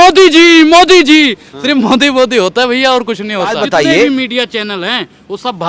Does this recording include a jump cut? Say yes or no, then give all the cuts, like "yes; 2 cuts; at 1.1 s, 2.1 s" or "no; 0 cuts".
yes; 1 cut; at 3.6 s